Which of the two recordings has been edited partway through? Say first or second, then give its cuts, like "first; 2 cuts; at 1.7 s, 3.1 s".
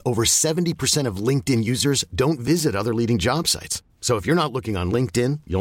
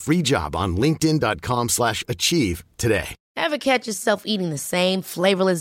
second; 1 cut; at 3.2 s